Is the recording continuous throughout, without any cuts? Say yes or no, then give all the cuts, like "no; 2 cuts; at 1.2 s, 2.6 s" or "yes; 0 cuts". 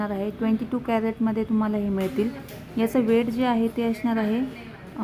yes; 0 cuts